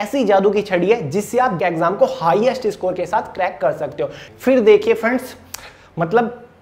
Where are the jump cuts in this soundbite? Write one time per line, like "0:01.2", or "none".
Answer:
0:01.6
0:04.3